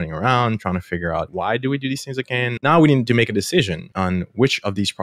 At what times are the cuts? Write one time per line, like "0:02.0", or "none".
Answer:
0:01.3
0:02.6
0:03.8